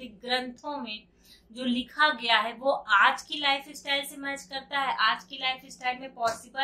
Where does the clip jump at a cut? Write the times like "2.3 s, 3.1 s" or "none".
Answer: none